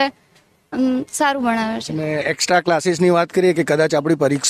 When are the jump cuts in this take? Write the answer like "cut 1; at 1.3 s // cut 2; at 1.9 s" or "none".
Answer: none